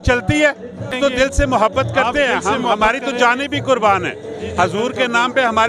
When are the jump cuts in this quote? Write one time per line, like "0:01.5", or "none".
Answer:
0:00.9